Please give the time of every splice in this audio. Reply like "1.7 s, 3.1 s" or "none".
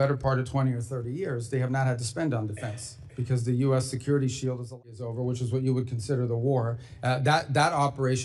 4.9 s